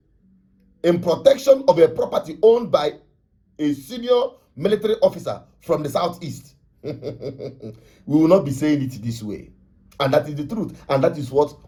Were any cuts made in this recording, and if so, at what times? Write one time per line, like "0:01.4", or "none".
none